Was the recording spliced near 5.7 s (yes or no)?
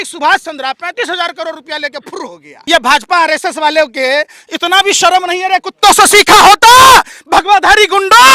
no